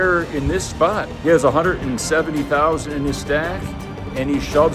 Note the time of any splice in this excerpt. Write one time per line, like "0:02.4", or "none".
none